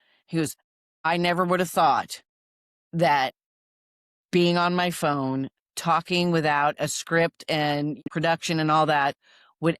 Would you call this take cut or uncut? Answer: cut